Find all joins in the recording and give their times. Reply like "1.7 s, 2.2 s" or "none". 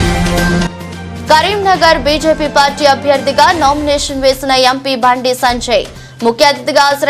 1.1 s

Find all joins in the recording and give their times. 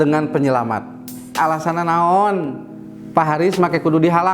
1.4 s

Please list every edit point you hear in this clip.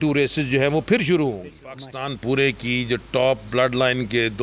1.8 s

